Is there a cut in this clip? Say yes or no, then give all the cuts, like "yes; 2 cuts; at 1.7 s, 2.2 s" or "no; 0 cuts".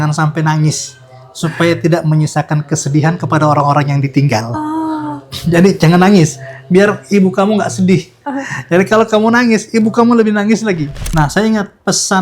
yes; 1 cut; at 11.0 s